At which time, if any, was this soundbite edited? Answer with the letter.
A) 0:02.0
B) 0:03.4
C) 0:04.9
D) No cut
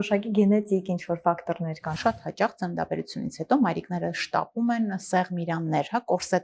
A